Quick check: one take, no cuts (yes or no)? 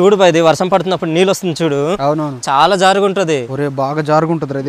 yes